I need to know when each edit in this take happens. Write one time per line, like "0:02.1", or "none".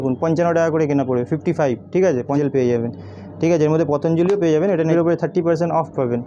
0:02.4
0:04.9